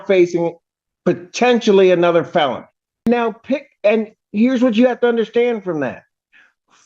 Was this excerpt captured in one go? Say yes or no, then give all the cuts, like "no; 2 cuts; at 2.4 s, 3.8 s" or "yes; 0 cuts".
no; 1 cut; at 3.1 s